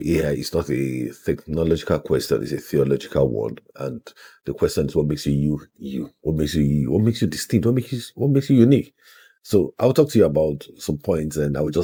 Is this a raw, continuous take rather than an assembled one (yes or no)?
yes